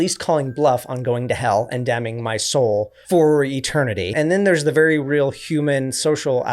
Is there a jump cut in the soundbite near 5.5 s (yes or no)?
no